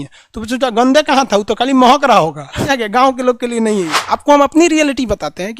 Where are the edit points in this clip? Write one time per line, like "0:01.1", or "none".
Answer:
0:02.7
0:04.0